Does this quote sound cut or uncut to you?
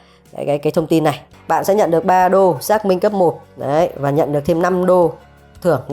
cut